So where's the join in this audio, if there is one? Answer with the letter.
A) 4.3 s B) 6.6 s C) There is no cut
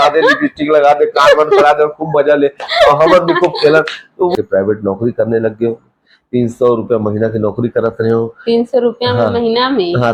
A